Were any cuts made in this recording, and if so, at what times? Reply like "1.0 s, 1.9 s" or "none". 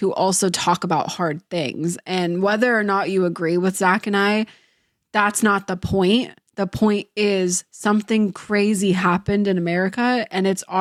none